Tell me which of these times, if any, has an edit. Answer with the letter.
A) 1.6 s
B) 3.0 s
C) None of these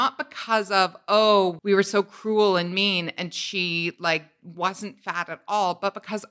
A